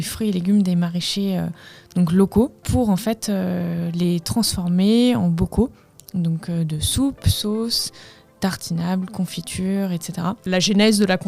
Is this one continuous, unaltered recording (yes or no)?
no